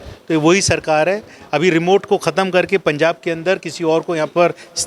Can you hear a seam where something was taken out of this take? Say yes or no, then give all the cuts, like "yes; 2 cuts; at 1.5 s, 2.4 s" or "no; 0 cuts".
no; 0 cuts